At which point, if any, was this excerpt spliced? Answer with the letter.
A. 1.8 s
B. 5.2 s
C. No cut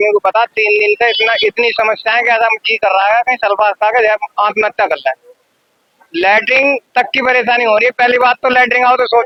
C